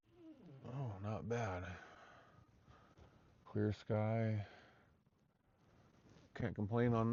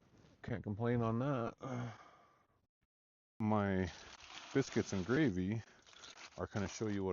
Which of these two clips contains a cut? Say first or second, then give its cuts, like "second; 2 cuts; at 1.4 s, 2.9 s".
second; 1 cut; at 3.2 s